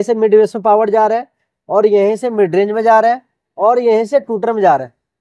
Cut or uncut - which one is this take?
uncut